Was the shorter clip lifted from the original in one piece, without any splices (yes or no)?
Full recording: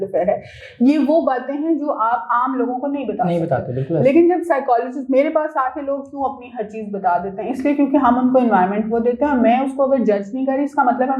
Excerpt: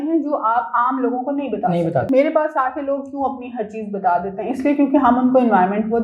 no